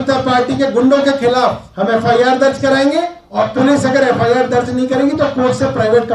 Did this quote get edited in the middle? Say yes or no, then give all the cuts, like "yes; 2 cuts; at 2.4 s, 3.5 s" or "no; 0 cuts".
yes; 2 cuts; at 1.7 s, 3.2 s